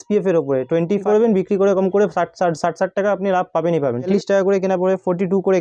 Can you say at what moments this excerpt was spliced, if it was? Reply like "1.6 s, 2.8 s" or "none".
1.0 s, 4.1 s